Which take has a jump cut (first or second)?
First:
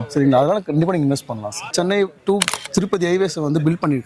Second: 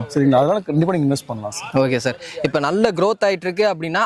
first